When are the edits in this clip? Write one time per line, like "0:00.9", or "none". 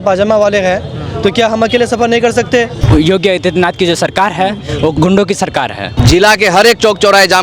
0:02.8
0:04.9
0:05.9